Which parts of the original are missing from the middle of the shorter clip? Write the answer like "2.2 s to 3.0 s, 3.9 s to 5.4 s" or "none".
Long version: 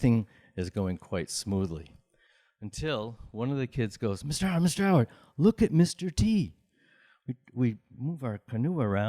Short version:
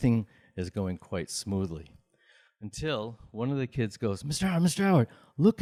none